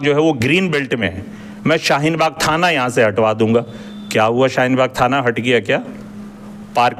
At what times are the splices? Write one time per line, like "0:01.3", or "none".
none